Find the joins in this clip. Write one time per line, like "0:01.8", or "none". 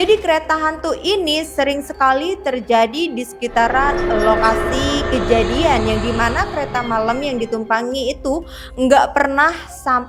none